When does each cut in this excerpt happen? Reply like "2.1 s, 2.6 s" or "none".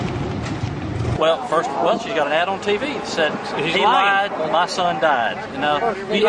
none